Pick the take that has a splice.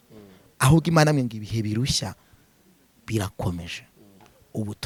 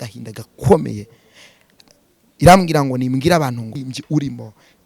second; 1 cut; at 3.9 s

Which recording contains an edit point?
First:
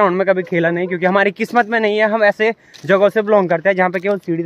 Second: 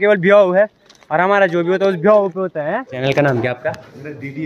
second; 1 cut; at 3.0 s

